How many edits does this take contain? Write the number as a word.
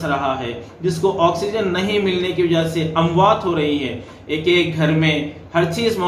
zero